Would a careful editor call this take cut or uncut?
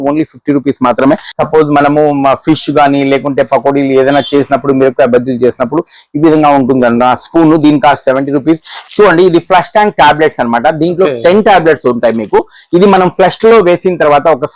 cut